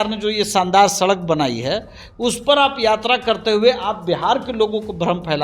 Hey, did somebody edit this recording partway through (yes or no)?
no